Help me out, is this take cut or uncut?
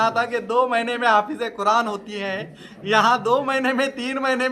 uncut